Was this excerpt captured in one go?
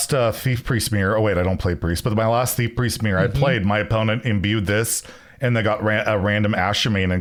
yes; 0 cuts

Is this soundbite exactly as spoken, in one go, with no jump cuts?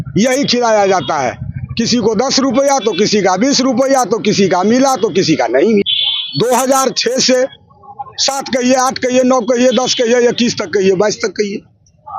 no; 1 cut; at 5.9 s

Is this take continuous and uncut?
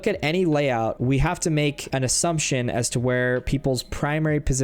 no; 2 cuts; at 1.0 s, 1.8 s

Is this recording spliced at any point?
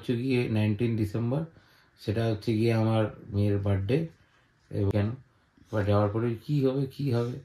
yes; 1 cut; at 4.9 s

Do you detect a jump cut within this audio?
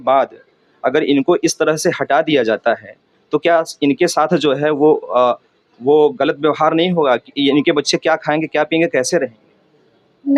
no; 0 cuts

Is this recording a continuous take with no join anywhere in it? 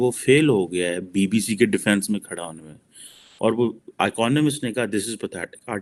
yes; 0 cuts

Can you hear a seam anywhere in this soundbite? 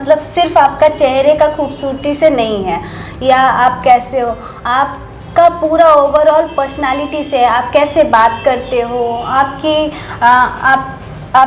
no; 0 cuts

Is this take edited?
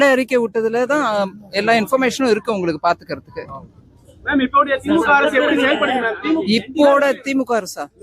yes; 1 cut; at 1.9 s

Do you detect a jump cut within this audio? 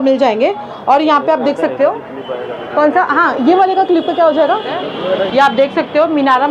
yes; 1 cut; at 5.3 s

